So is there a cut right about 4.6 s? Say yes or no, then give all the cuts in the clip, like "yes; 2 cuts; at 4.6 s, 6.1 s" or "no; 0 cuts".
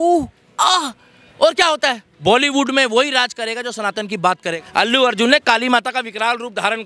yes; 2 cuts; at 2.1 s, 4.6 s